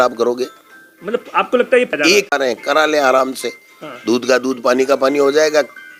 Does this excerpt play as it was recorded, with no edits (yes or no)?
yes